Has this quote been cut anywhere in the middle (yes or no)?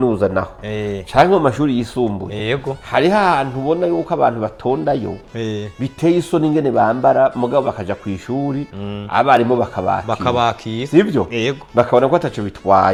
no